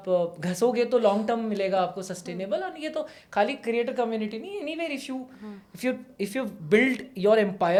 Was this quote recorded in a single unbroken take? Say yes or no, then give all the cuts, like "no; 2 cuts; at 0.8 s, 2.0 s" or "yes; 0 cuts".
yes; 0 cuts